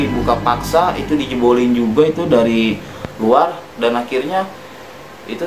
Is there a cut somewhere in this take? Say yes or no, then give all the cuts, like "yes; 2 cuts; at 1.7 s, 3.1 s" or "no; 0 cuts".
no; 0 cuts